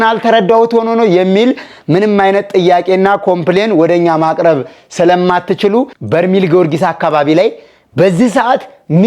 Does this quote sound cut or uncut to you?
cut